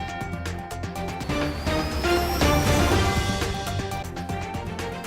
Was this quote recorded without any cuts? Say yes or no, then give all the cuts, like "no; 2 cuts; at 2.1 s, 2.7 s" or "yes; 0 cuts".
no; 1 cut; at 1.2 s